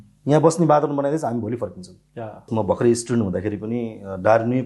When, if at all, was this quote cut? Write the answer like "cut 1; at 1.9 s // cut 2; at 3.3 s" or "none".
cut 1; at 2.5 s